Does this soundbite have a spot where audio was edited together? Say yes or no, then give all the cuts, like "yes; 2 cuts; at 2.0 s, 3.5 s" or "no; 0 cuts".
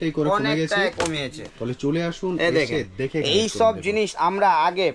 no; 0 cuts